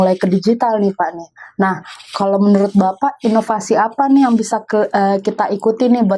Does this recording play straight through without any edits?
yes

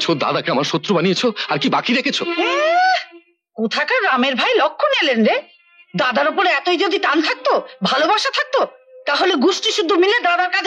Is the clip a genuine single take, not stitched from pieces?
yes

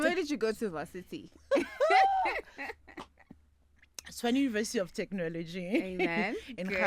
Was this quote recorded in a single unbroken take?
yes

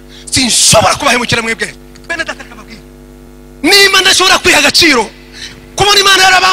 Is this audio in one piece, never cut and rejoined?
no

